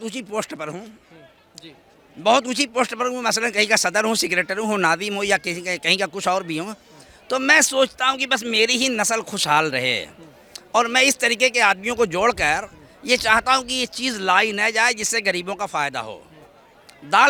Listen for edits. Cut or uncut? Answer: uncut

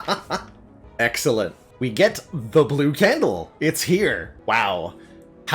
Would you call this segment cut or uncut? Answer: cut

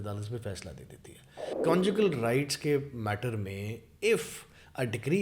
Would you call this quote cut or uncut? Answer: cut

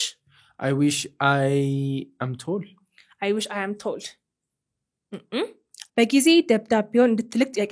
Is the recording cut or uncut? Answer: cut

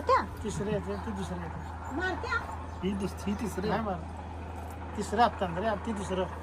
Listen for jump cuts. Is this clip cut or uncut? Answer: uncut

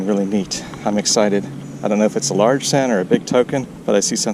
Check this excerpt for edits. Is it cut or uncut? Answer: uncut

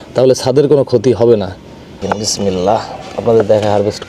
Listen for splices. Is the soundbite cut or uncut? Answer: cut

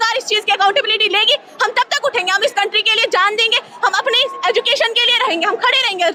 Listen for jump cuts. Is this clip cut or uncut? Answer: uncut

